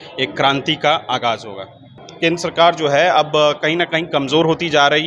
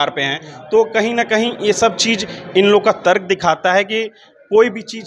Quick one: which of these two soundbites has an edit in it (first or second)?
first